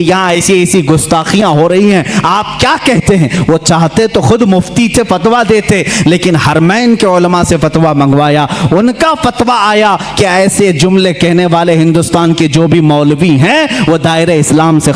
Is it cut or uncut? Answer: uncut